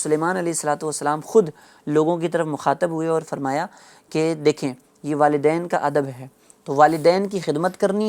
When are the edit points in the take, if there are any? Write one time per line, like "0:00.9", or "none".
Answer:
none

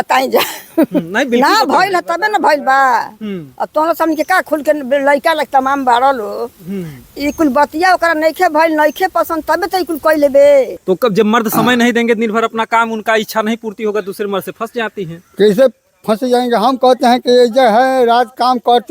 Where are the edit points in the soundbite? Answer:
0:10.8

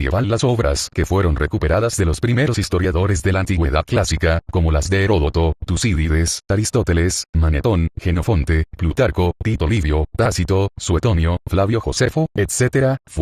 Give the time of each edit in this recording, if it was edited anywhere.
none

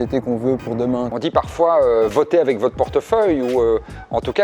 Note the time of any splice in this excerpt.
0:01.1

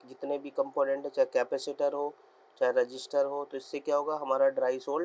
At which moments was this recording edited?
none

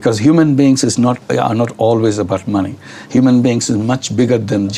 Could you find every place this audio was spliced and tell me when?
none

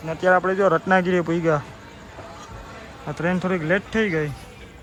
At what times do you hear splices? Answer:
none

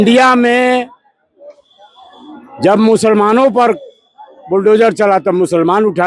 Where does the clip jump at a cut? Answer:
none

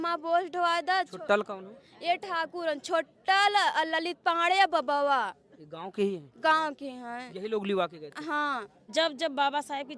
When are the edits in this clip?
0:08.8

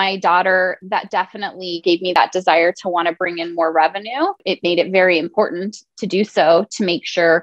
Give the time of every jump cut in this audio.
0:02.2
0:04.4

